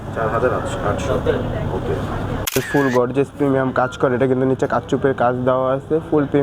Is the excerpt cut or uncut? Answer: cut